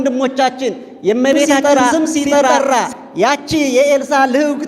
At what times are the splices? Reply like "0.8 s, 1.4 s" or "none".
2.5 s